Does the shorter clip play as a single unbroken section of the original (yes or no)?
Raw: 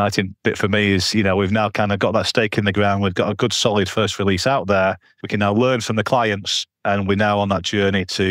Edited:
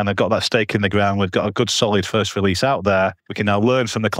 no